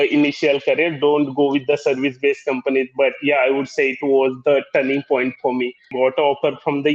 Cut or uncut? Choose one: cut